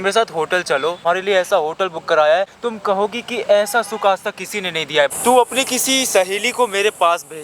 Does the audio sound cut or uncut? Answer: cut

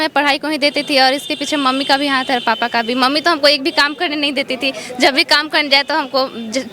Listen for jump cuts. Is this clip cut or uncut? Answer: uncut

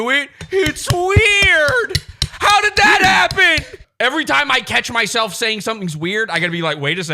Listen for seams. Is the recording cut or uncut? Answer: cut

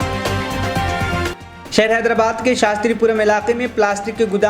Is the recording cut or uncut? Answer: cut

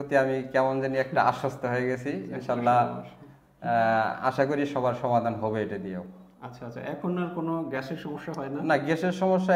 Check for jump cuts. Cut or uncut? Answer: uncut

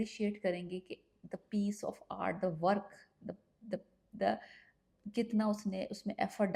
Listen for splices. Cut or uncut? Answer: uncut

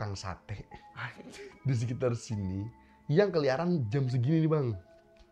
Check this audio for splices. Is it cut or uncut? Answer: uncut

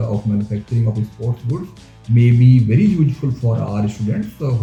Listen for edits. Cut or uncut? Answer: uncut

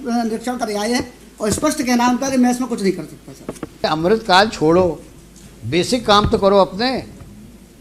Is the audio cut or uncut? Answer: cut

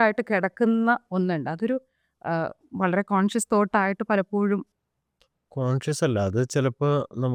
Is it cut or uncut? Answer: uncut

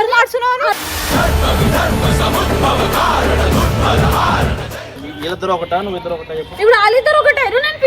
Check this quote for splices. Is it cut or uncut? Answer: cut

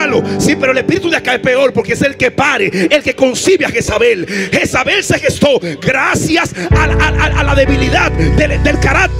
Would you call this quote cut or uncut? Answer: uncut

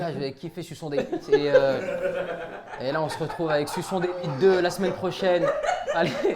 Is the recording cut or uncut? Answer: uncut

